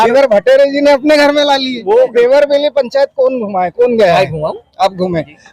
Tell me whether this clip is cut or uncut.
cut